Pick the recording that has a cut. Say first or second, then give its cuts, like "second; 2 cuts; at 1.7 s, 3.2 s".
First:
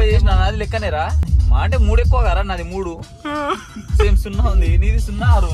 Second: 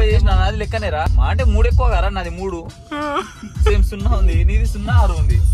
second; 1 cut; at 1.1 s